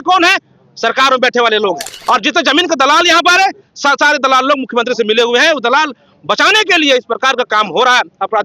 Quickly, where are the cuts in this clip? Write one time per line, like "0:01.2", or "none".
0:01.9